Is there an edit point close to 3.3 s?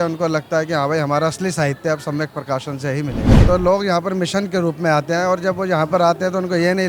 yes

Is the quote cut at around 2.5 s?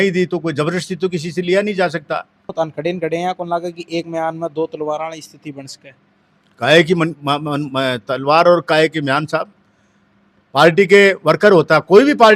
yes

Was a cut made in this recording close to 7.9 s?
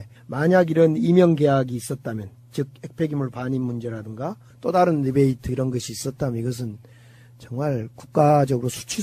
yes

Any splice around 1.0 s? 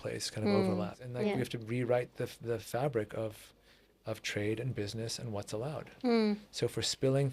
yes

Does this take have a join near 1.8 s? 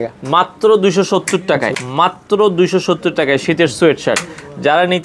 yes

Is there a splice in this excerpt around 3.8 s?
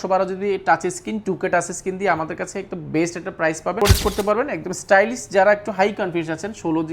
yes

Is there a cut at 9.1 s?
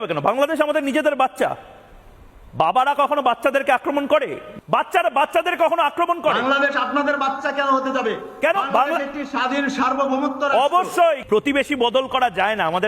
no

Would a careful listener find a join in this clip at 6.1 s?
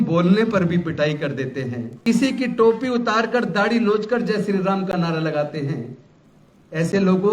no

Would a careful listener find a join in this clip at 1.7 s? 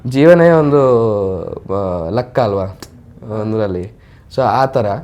no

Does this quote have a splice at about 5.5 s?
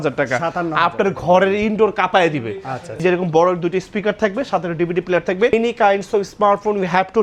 yes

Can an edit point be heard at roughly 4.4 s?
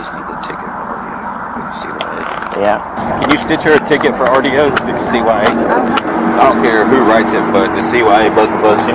no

